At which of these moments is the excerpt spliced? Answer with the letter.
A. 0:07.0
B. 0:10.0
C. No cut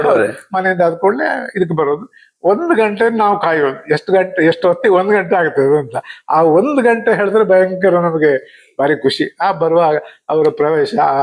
C